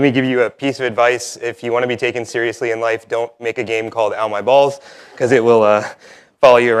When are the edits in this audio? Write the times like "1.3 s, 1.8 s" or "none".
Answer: 1.8 s